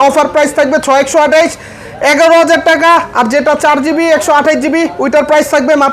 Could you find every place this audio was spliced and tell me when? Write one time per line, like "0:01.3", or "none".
none